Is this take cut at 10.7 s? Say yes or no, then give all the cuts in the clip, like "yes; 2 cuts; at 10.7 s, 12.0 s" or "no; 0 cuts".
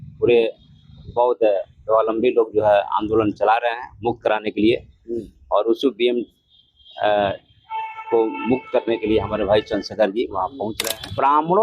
yes; 1 cut; at 10.7 s